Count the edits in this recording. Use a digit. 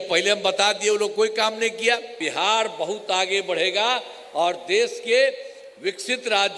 1